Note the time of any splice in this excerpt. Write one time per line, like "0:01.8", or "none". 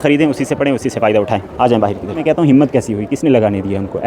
0:02.2